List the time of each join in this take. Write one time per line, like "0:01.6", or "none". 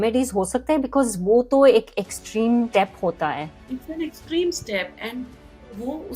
0:03.2